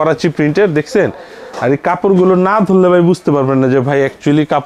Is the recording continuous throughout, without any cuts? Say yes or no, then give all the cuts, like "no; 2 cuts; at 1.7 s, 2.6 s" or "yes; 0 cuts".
yes; 0 cuts